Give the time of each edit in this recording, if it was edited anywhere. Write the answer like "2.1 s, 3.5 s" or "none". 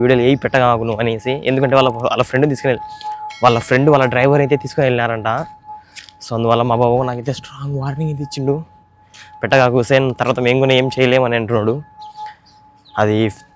none